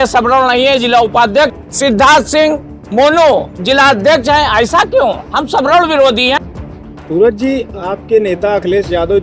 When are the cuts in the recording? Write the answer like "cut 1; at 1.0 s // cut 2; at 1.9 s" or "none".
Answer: cut 1; at 1.5 s // cut 2; at 6.4 s